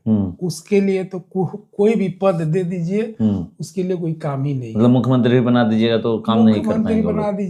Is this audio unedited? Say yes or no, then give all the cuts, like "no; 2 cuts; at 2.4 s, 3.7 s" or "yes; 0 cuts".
yes; 0 cuts